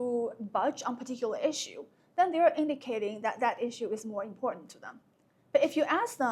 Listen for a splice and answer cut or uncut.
uncut